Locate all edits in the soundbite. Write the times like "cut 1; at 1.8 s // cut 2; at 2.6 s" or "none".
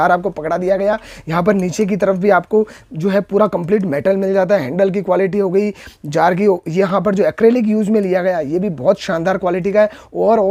none